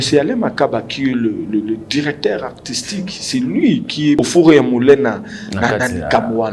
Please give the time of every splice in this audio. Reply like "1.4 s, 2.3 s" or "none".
4.2 s